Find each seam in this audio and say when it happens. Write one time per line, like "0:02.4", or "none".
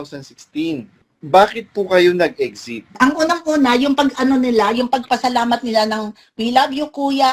0:01.0
0:02.9